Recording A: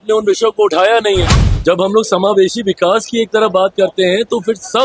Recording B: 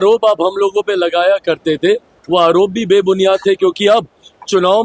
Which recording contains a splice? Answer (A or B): A